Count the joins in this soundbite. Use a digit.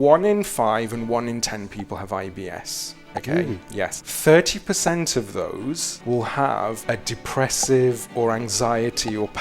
3